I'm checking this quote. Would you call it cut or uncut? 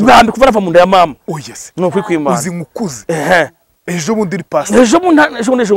uncut